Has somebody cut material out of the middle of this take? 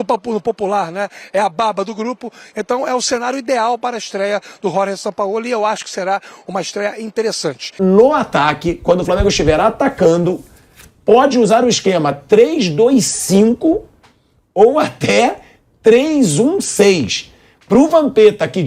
yes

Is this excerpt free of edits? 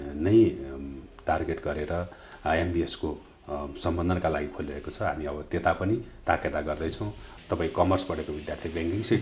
no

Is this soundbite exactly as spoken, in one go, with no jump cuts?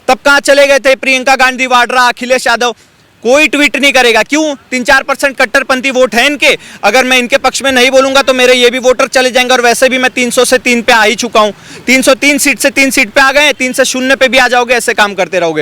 yes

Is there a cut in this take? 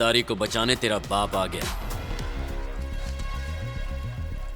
yes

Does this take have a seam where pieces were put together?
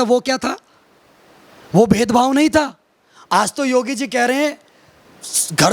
no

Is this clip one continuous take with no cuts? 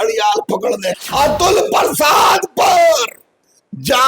no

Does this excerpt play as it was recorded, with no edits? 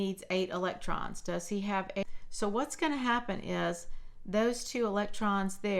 no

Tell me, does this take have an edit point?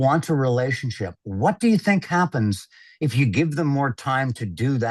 no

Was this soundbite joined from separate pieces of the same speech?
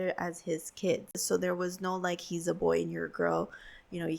yes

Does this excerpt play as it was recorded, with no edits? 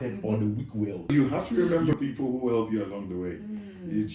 no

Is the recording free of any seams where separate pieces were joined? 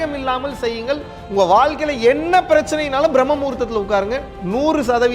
yes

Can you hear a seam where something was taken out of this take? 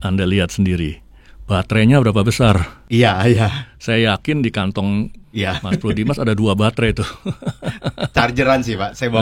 yes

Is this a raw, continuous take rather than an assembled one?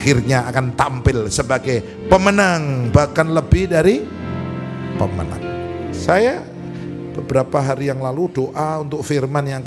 yes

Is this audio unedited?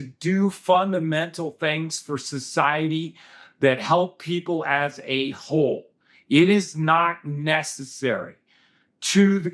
yes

